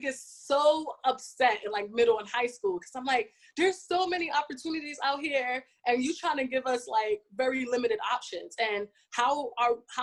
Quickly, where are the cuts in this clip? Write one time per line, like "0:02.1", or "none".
none